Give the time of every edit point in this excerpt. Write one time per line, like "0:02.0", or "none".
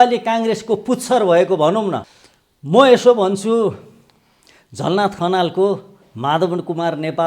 0:02.1